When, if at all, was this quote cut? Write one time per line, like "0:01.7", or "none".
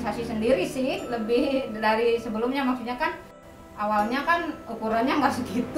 0:03.4